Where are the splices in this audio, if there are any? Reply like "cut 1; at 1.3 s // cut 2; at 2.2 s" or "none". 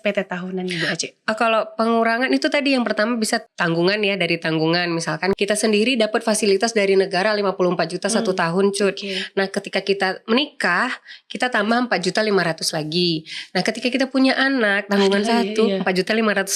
cut 1; at 3.4 s // cut 2; at 5.4 s